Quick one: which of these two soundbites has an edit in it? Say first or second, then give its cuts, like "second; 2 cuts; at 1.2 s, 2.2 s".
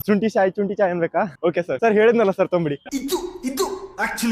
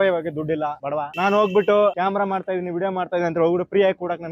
first; 2 cuts; at 1.7 s, 2.8 s